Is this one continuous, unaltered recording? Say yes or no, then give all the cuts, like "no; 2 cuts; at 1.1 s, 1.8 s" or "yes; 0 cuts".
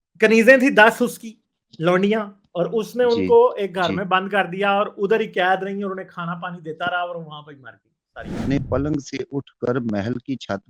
no; 1 cut; at 8.4 s